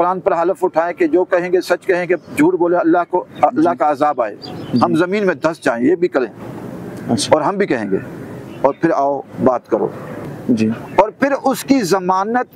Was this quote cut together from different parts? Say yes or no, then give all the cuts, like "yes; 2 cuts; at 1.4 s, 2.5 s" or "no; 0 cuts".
yes; 1 cut; at 10.2 s